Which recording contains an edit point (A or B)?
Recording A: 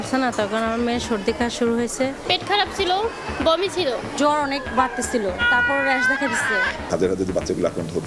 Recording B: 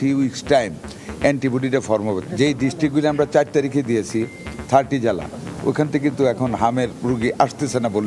A